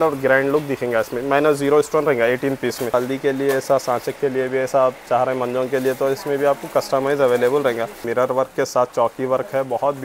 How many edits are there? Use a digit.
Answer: 2